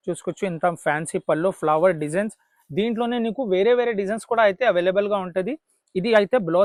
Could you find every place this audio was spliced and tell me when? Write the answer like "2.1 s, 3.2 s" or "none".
none